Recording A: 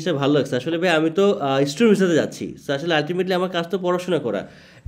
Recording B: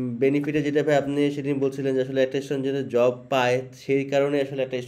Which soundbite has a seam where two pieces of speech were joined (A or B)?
B